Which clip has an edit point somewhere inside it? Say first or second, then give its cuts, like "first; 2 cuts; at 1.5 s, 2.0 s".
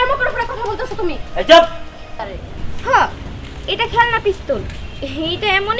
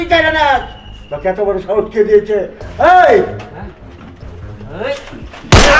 first; 1 cut; at 2.4 s